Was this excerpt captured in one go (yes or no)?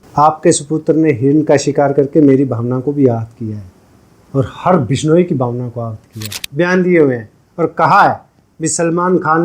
no